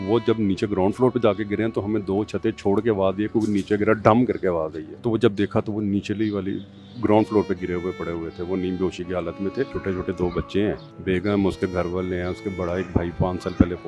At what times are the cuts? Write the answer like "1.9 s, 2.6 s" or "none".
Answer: 4.8 s, 9.8 s, 10.9 s